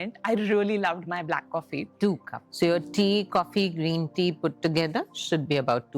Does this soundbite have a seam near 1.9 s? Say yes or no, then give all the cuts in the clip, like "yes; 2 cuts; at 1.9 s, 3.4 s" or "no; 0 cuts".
yes; 1 cut; at 1.9 s